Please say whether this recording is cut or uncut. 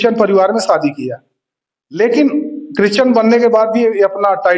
uncut